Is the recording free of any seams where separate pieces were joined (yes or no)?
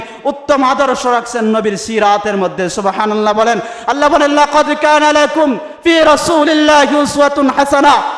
yes